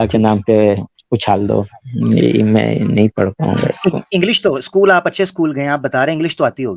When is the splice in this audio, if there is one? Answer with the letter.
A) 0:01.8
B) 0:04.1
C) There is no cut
A